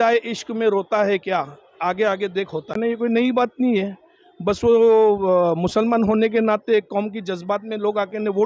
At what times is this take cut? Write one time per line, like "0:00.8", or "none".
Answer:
0:02.8